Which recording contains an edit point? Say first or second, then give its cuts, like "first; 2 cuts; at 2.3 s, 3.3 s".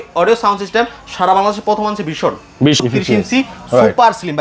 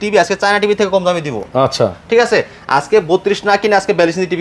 first; 1 cut; at 2.8 s